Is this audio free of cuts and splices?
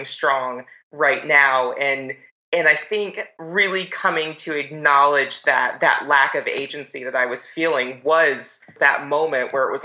no; 1 cut; at 8.7 s

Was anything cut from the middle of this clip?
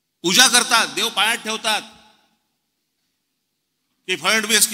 no; 0 cuts

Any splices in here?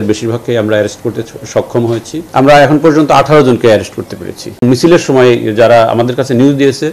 yes; 2 cuts; at 2.2 s, 4.6 s

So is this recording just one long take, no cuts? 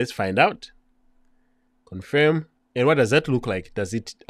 no; 1 cut; at 2.6 s

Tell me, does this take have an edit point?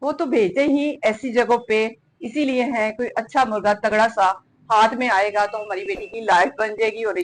no; 0 cuts

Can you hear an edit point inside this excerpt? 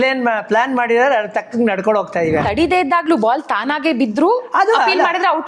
yes; 1 cut; at 2.4 s

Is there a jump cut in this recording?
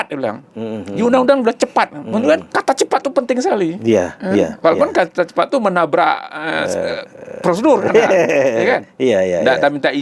yes; 1 cut; at 2.5 s

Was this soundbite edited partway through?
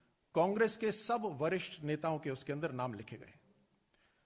yes; 2 cuts; at 1.3 s, 2.4 s

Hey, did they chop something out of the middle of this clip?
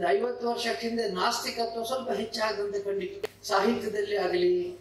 yes; 1 cut; at 3.3 s

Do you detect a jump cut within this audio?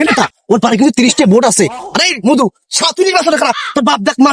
no; 0 cuts

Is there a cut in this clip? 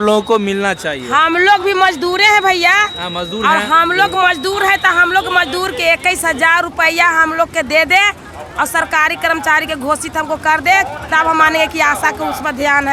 no; 0 cuts

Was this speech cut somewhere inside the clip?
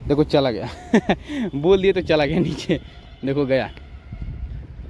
no; 0 cuts

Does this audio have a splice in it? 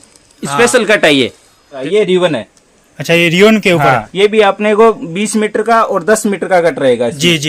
yes; 2 cuts; at 1.8 s, 4.1 s

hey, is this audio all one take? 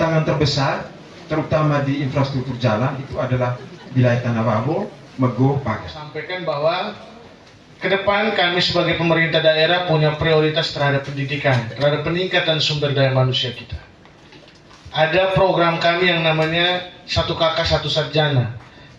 no; 1 cut; at 6.2 s

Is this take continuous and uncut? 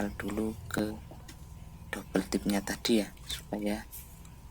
yes; 0 cuts

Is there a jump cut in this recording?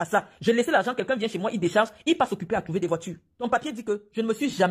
yes; 1 cut; at 3.5 s

